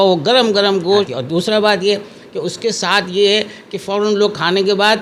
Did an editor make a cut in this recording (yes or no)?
yes